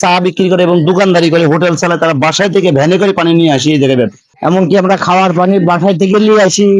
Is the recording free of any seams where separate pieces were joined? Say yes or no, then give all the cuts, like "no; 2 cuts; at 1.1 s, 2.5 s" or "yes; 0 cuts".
no; 1 cut; at 4.2 s